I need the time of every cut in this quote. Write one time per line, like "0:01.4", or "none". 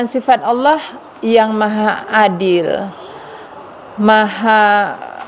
none